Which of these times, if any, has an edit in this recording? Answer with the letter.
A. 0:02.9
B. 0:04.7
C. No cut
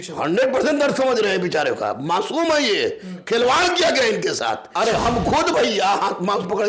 B